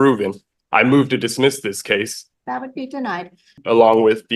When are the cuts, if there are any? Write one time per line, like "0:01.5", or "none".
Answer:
0:02.2
0:03.6